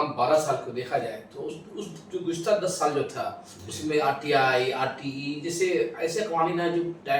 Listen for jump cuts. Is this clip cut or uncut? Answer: uncut